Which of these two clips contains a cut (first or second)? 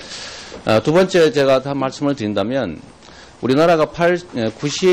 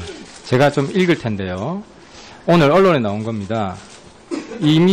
second